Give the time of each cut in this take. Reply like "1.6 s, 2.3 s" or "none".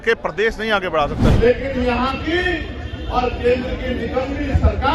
1.3 s